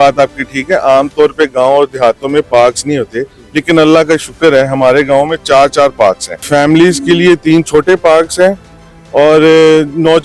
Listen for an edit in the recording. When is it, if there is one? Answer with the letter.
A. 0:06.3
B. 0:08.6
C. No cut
A